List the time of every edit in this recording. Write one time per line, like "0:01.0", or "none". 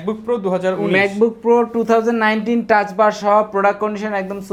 none